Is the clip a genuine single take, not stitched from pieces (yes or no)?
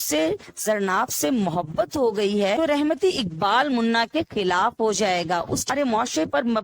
no